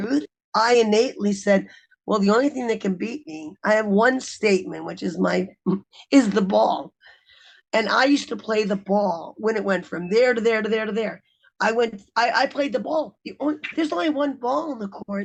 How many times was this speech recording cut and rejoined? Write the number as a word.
zero